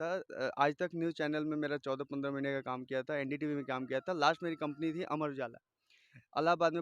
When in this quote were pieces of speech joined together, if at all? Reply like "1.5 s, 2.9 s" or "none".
none